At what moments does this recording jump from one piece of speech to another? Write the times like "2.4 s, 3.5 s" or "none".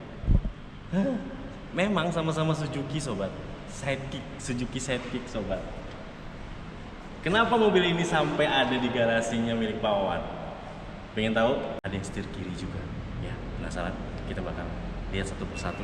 11.8 s